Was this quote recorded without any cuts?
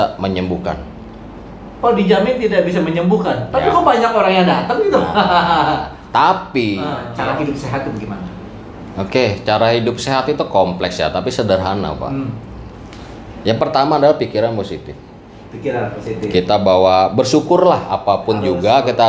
no; 1 cut; at 7.1 s

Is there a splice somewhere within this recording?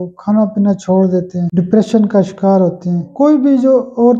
yes; 2 cuts; at 1.5 s, 3.1 s

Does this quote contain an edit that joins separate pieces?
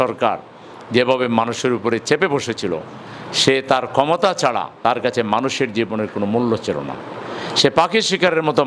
no; 0 cuts

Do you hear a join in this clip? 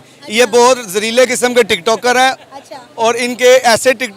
no; 0 cuts

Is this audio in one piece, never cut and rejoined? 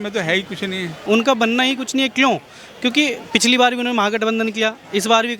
no; 1 cut; at 1.0 s

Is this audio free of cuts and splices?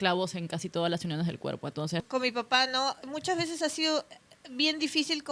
no; 2 cuts; at 2.1 s, 3.0 s

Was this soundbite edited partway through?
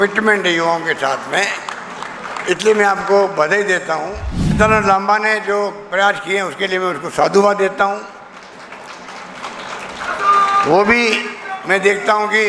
yes; 1 cut; at 4.6 s

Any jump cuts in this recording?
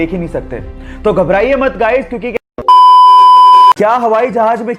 yes; 2 cuts; at 2.3 s, 3.7 s

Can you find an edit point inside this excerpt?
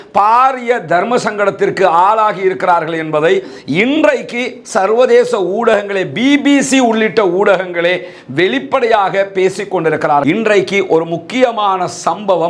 yes; 1 cut; at 10.2 s

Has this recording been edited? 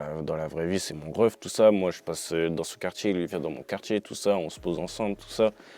no; 0 cuts

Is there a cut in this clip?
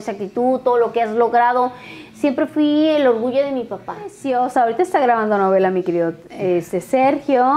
yes; 1 cut; at 4.2 s

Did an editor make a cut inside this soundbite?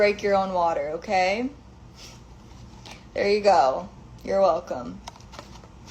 no; 0 cuts

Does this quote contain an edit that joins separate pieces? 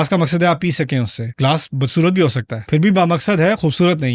yes; 2 cuts; at 1.2 s, 2.5 s

